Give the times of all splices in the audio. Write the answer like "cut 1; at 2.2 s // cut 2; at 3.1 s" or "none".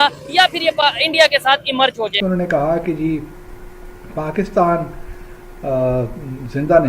cut 1; at 2.2 s